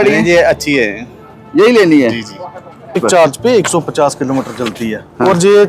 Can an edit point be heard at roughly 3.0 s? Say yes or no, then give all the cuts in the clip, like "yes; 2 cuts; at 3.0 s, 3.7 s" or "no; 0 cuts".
yes; 1 cut; at 3.0 s